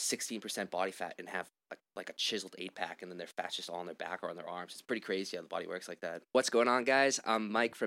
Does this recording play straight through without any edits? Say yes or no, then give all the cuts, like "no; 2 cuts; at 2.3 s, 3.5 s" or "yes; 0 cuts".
no; 1 cut; at 6.2 s